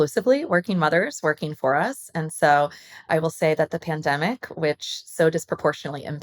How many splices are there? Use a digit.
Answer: 1